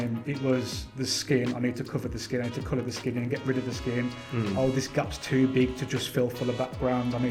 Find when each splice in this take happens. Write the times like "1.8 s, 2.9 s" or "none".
none